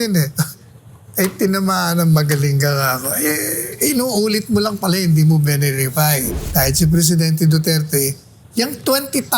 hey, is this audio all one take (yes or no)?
no